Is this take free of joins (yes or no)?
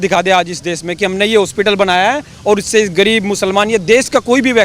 yes